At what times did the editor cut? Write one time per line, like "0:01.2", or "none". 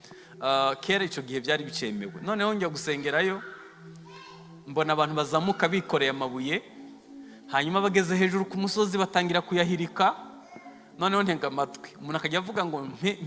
none